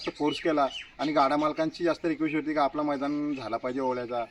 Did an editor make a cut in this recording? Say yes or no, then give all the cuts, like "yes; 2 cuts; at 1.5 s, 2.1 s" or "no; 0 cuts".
no; 0 cuts